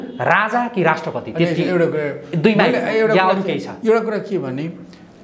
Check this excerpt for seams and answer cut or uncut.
uncut